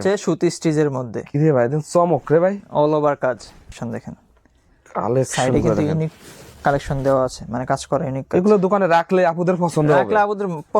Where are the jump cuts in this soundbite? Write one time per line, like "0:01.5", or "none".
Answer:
0:03.8